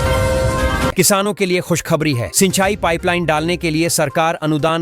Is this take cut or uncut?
cut